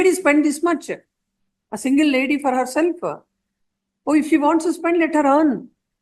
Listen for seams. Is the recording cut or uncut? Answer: uncut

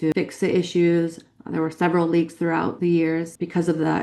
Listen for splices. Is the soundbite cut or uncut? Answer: uncut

